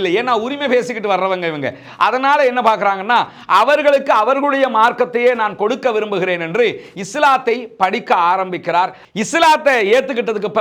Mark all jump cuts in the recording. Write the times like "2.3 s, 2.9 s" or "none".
9.0 s